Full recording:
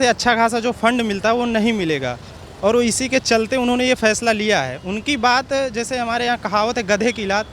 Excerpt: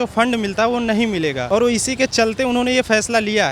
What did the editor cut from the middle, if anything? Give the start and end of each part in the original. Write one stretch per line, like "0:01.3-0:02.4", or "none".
0:02.1-0:02.5